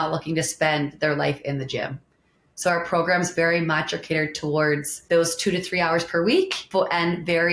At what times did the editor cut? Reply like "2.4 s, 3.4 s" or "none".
4.9 s, 6.6 s